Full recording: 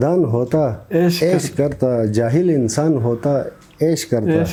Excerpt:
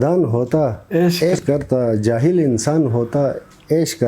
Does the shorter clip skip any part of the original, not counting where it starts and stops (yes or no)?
yes